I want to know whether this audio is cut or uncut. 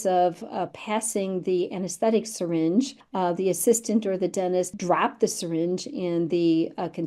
cut